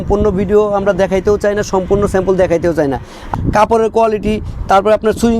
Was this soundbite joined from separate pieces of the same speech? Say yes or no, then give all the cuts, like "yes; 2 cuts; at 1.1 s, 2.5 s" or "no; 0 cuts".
yes; 1 cut; at 3.3 s